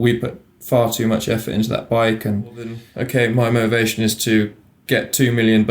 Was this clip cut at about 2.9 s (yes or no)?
yes